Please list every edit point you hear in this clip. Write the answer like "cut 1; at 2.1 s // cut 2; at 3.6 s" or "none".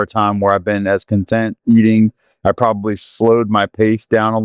none